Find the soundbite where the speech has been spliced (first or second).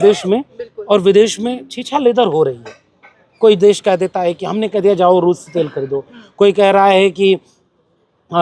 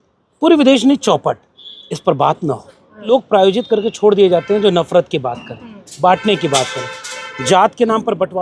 second